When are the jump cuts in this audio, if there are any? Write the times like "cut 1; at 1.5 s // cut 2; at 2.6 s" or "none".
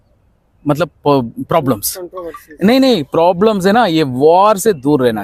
none